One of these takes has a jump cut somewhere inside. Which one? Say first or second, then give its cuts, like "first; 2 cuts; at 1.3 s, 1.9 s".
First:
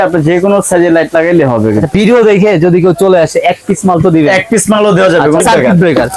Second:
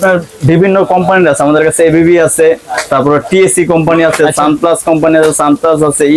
first; 2 cuts; at 1.9 s, 5.4 s